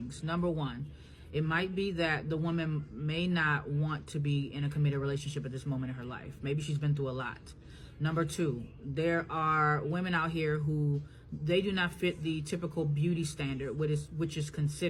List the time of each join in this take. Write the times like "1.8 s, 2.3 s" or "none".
9.0 s